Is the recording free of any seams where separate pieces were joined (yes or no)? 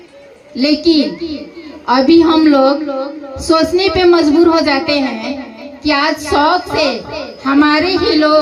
yes